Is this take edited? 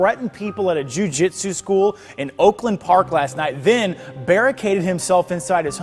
no; 0 cuts

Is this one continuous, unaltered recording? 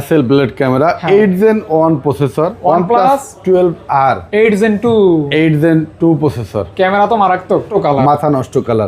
no; 2 cuts; at 2.5 s, 7.7 s

